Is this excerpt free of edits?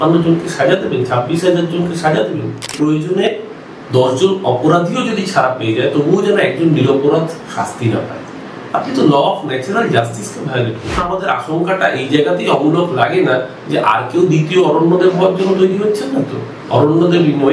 no; 2 cuts; at 2.7 s, 11.0 s

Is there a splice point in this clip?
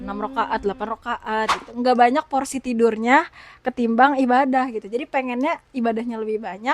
yes; 1 cut; at 1.6 s

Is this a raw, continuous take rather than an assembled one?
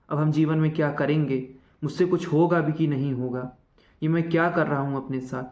yes; 0 cuts

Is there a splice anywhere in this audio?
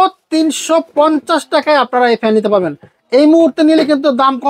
no; 0 cuts

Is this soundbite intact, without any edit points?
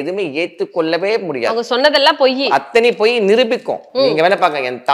yes; 0 cuts

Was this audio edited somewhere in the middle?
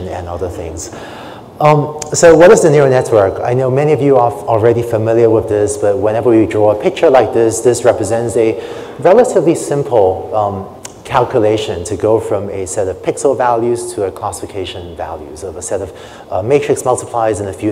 yes; 1 cut; at 2.9 s

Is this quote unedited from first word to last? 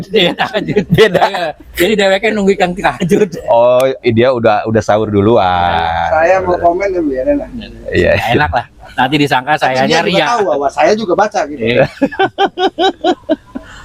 yes; 0 cuts

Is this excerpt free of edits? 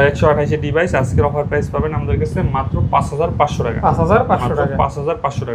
yes; 0 cuts

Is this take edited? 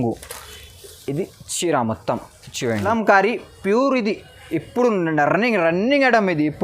yes; 1 cut; at 2.8 s

